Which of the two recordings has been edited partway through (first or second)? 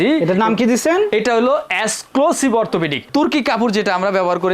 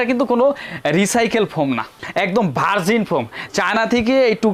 first